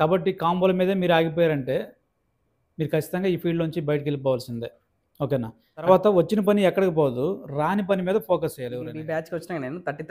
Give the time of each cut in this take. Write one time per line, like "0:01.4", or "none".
0:05.9
0:09.0